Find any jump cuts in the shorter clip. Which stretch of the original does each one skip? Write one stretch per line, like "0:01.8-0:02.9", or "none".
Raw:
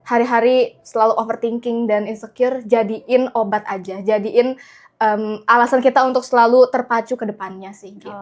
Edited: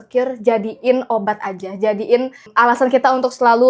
0:04.7-0:05.3